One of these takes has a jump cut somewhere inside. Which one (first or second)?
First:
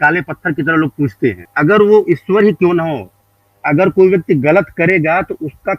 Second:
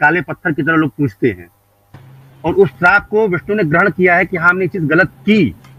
first